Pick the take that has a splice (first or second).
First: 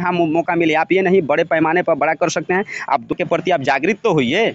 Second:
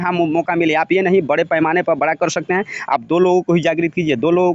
first